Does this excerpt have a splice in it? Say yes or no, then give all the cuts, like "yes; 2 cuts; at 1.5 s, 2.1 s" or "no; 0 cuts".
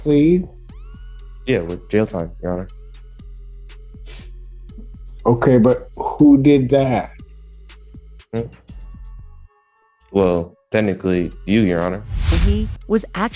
no; 0 cuts